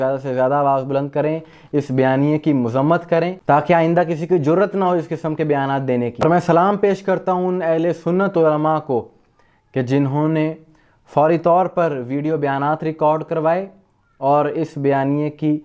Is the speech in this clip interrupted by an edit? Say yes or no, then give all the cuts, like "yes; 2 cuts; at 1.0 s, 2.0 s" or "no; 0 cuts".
no; 0 cuts